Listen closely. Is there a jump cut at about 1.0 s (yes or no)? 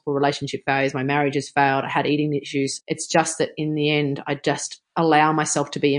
no